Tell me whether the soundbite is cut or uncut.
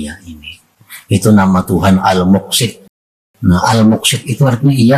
cut